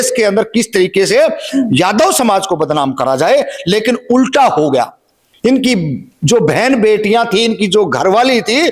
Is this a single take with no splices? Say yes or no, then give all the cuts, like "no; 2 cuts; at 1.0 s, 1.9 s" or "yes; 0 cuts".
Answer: yes; 0 cuts